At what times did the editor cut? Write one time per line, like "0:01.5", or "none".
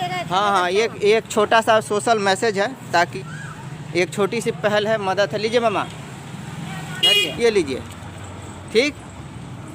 0:03.1
0:07.3

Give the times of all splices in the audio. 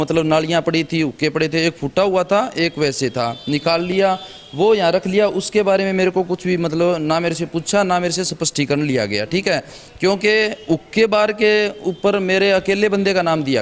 none

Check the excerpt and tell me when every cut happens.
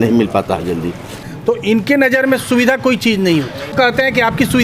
0:01.1
0:03.7

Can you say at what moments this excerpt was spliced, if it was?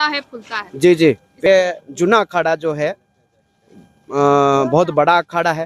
0:01.5

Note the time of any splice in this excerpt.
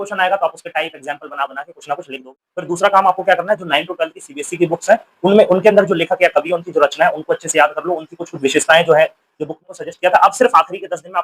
0:02.5
0:09.6

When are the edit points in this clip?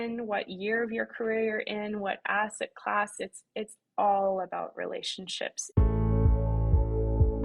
0:05.6

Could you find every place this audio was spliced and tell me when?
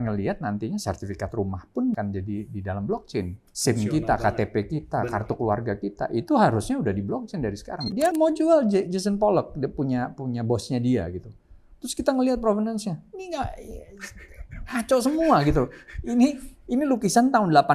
0:02.0
0:03.4
0:08.1

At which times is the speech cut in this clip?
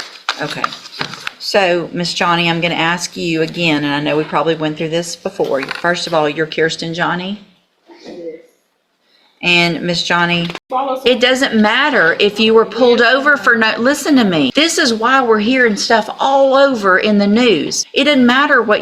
0:10.6
0:14.5
0:17.8

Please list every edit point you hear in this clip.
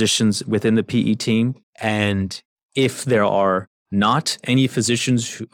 0:01.7
0:03.8

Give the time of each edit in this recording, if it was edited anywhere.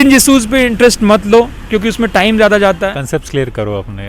0:03.0

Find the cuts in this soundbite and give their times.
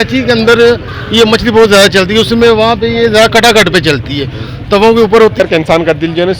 0:05.4

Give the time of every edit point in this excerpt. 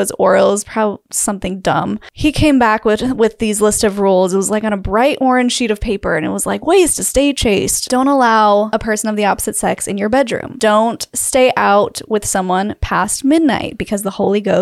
0:02.1
0:07.8
0:08.7
0:10.5

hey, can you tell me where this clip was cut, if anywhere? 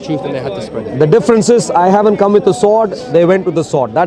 none

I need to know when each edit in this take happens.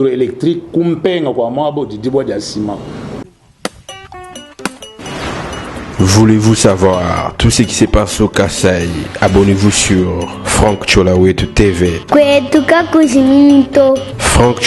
0:03.2

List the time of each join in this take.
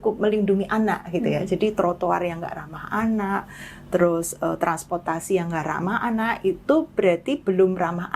none

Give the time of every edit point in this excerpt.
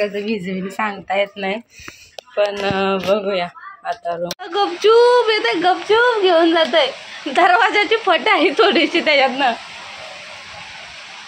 0:04.4

